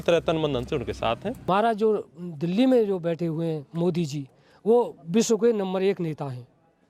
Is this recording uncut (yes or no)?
no